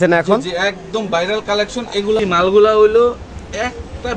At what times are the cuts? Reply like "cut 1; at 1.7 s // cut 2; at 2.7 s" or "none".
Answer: cut 1; at 2.2 s